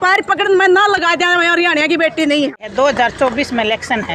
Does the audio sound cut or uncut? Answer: cut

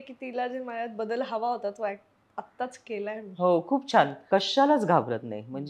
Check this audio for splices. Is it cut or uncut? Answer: cut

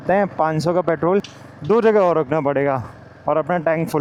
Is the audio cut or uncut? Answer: uncut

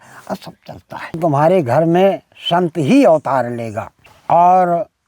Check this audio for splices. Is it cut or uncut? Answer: cut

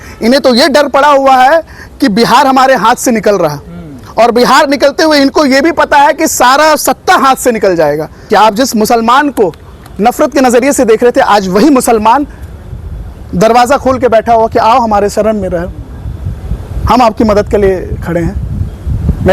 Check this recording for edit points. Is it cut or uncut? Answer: cut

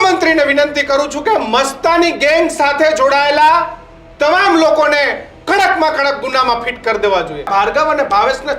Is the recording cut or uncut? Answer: cut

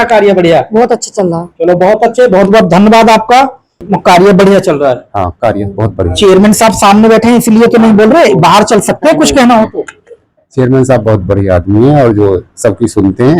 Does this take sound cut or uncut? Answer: cut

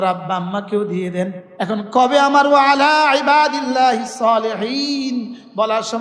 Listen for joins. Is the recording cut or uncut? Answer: cut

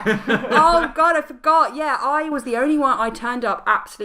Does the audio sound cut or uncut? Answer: uncut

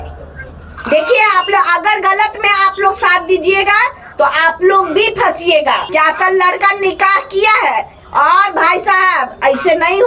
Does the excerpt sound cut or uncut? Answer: cut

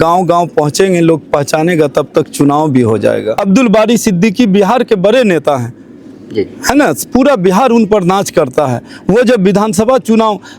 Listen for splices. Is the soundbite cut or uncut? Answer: cut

